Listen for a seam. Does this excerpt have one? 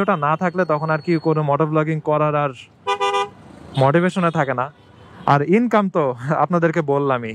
no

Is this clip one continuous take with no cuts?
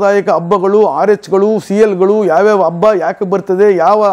yes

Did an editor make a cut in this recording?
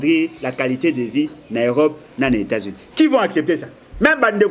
no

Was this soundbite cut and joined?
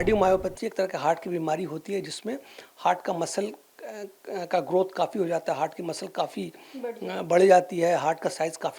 no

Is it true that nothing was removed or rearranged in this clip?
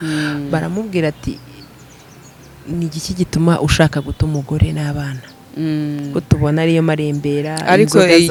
yes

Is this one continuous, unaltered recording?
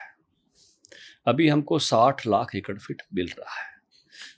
yes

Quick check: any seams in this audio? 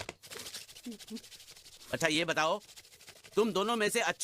yes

